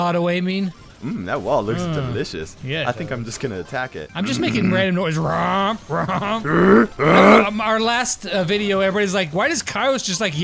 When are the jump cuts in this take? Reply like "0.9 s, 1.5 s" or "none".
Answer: 0.9 s, 4.0 s, 6.4 s